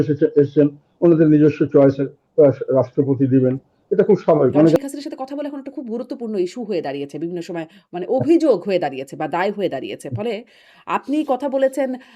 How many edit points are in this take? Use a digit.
1